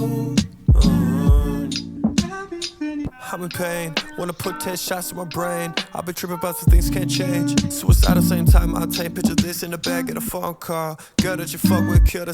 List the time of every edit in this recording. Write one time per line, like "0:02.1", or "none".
0:01.8
0:03.0